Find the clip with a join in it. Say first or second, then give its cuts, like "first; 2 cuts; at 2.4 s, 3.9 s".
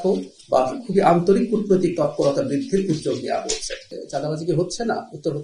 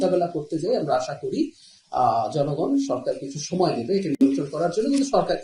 first; 1 cut; at 4.0 s